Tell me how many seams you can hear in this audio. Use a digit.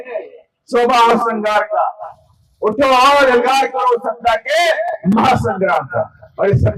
0